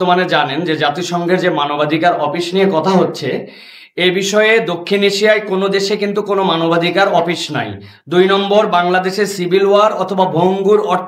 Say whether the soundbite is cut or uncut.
uncut